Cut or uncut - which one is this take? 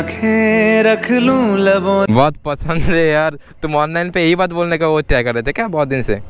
uncut